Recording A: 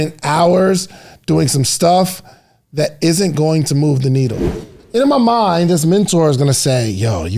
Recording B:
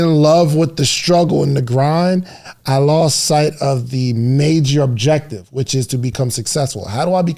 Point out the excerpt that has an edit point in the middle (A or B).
A